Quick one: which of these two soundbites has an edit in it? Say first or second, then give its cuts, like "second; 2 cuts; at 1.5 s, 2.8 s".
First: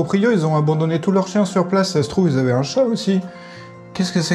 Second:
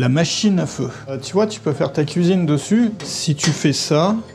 second; 2 cuts; at 1.2 s, 3.0 s